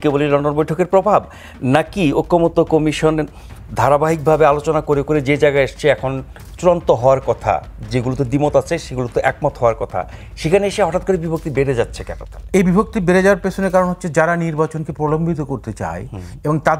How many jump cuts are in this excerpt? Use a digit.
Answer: 0